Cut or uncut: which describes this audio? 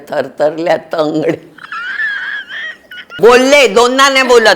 cut